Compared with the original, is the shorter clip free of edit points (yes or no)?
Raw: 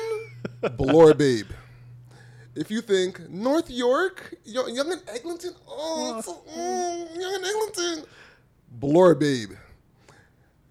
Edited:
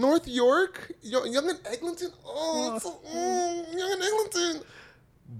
yes